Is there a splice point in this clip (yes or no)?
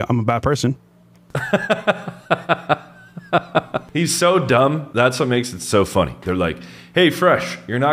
no